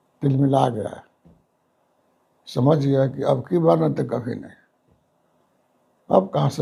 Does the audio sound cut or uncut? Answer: uncut